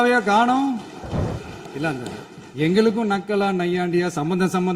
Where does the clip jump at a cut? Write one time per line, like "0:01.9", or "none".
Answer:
0:01.3